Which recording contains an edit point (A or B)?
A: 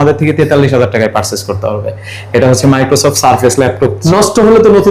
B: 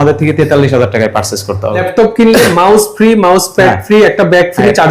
B